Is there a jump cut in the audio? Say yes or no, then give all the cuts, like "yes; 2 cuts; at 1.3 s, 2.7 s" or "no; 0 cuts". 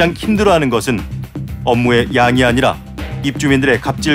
no; 0 cuts